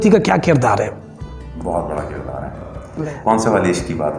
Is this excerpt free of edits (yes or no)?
no